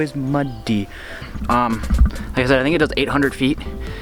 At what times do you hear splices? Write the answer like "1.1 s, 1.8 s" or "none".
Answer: 1.2 s

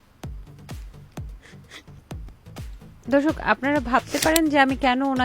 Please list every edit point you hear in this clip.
2.9 s

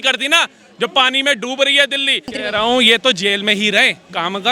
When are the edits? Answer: 2.4 s

